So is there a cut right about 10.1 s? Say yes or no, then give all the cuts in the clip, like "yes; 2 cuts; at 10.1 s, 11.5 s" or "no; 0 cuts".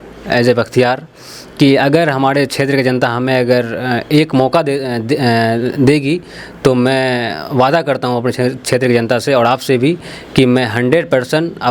no; 0 cuts